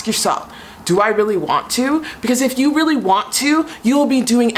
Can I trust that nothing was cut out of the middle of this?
yes; 0 cuts

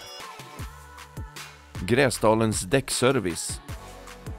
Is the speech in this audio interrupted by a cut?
yes; 1 cut; at 3.3 s

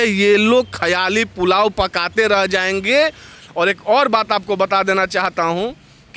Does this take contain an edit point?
yes; 1 cut; at 3.4 s

